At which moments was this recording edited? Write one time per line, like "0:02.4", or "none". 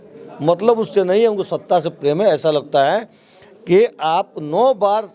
none